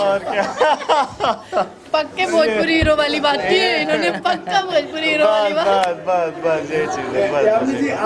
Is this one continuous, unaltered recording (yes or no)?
yes